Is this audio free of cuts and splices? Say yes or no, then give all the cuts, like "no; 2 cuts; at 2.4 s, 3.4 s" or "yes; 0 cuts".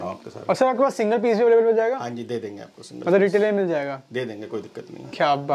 yes; 0 cuts